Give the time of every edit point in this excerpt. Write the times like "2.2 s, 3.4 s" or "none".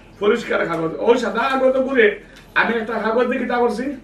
none